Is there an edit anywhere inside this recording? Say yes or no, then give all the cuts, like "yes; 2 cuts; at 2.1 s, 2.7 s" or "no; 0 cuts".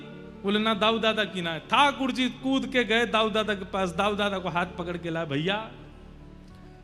no; 0 cuts